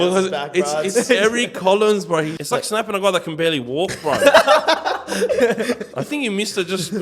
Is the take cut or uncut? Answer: cut